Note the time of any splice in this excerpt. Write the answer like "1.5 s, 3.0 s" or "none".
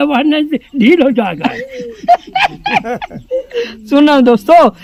none

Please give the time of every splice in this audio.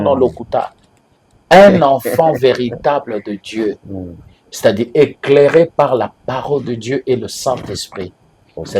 none

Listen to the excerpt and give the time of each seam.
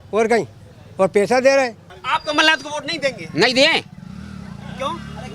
1.9 s

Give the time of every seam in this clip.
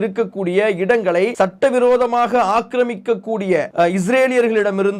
1.3 s, 3.7 s

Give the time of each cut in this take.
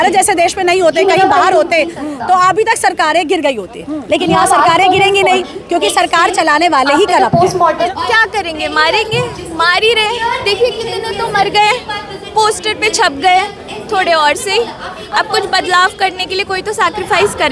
8.0 s

